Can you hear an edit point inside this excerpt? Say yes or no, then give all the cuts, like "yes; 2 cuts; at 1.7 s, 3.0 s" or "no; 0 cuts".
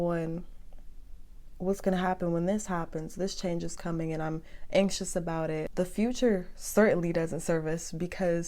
yes; 1 cut; at 5.7 s